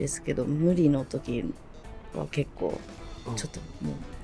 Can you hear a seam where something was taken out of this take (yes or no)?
no